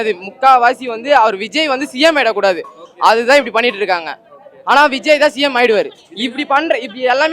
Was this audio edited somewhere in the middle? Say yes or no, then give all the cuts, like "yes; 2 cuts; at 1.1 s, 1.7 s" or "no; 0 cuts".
no; 0 cuts